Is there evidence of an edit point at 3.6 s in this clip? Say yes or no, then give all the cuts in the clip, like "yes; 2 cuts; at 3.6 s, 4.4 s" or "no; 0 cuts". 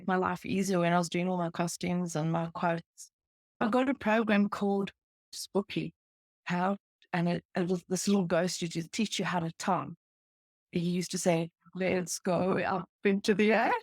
yes; 3 cuts; at 3.6 s, 5.3 s, 10.6 s